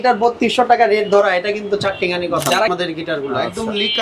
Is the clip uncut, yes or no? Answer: no